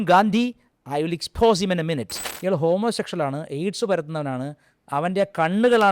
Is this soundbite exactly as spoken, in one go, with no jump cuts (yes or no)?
no